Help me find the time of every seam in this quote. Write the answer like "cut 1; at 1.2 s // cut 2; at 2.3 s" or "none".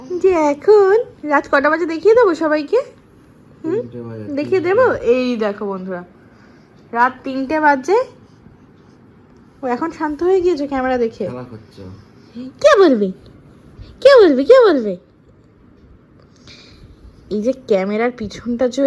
none